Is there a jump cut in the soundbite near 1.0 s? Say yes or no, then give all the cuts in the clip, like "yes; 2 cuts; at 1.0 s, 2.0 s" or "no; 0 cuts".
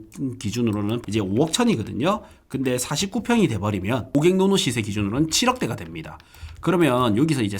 yes; 2 cuts; at 1.0 s, 4.1 s